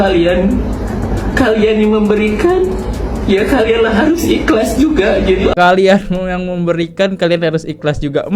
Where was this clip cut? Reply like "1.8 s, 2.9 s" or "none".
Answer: none